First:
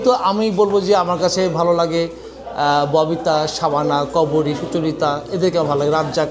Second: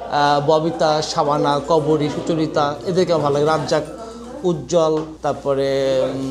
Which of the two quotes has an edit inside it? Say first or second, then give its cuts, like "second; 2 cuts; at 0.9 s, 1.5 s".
second; 1 cut; at 5.1 s